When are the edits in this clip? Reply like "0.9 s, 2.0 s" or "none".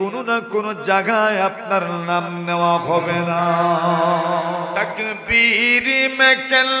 4.8 s